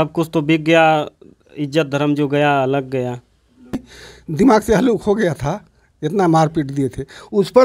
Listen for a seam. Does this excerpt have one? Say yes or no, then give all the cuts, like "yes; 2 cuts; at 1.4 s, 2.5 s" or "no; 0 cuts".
yes; 1 cut; at 3.8 s